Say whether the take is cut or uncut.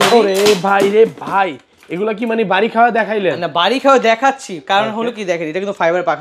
uncut